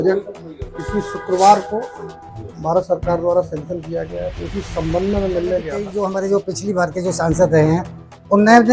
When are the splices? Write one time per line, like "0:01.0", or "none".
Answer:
0:05.8

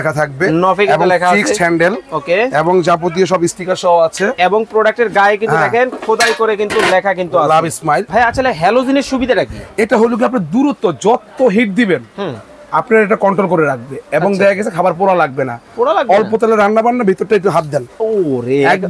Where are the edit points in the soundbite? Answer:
0:08.1

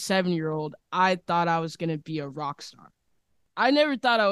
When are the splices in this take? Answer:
0:03.4

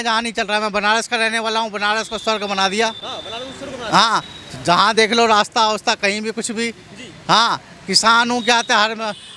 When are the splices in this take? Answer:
none

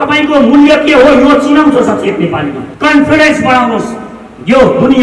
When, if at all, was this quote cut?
0:02.6

